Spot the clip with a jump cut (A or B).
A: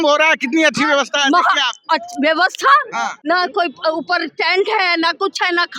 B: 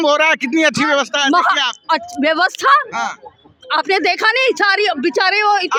A